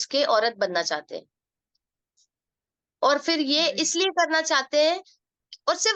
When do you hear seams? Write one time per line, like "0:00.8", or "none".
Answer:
none